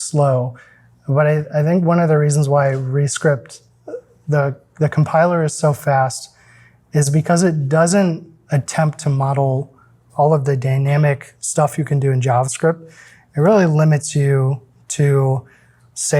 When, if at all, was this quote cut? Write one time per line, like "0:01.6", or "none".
0:10.0